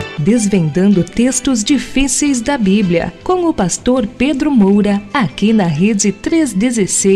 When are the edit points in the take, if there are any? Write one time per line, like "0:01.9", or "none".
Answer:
0:05.0